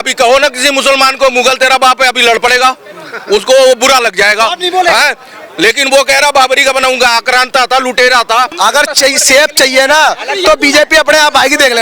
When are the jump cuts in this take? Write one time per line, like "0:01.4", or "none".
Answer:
0:08.6